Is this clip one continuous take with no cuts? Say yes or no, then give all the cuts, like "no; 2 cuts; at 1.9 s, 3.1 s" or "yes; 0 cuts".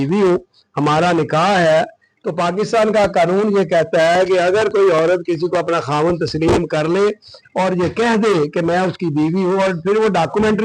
yes; 0 cuts